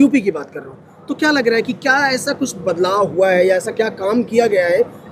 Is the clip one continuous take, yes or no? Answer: yes